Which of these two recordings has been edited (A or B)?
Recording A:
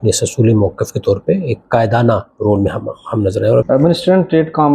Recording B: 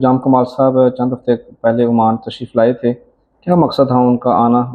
A